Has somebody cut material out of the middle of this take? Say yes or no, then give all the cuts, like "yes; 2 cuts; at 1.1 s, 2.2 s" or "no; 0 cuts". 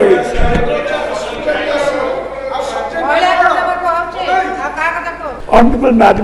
yes; 1 cut; at 5.3 s